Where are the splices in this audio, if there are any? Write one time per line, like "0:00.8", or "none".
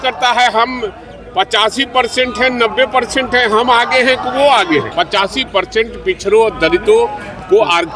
0:04.9